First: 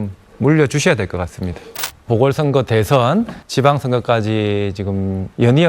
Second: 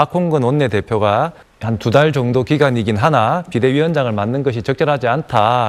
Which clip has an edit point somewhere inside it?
first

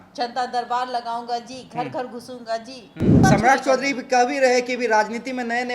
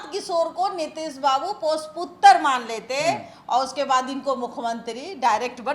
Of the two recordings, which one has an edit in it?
first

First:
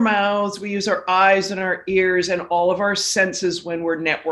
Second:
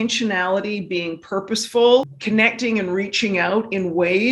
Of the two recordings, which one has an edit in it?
second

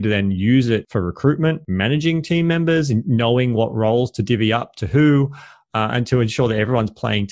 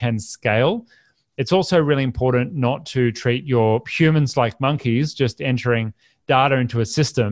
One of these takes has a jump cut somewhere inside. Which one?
first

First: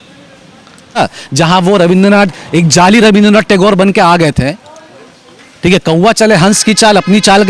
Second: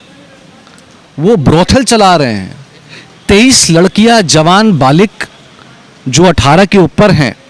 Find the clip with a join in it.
first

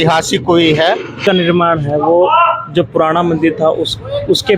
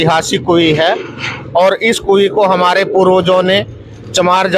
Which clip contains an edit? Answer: first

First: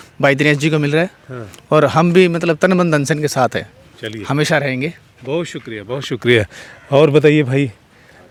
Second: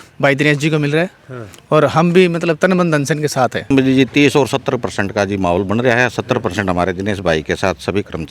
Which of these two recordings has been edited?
second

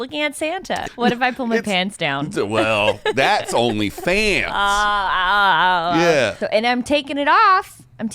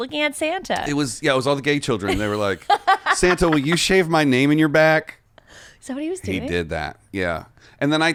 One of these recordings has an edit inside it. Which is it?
first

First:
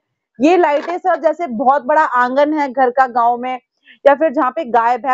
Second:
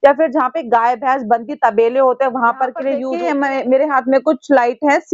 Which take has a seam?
second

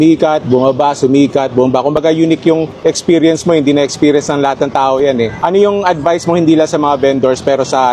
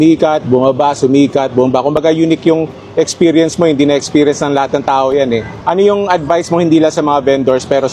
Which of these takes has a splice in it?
first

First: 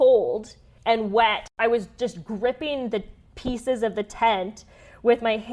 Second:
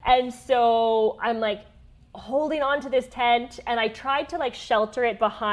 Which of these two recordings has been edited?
first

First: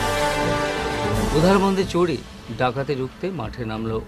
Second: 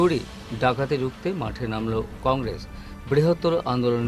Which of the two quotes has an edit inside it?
first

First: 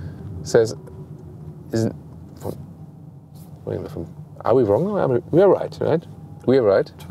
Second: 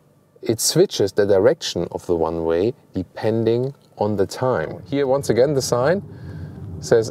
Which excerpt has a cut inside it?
second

